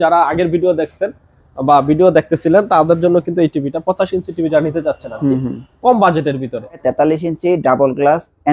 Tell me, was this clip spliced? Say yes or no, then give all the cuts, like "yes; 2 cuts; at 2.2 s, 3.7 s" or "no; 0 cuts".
yes; 1 cut; at 6.8 s